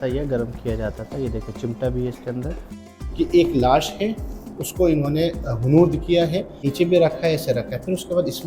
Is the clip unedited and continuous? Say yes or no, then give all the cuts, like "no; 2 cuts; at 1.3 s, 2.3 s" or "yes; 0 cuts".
no; 2 cuts; at 2.9 s, 6.7 s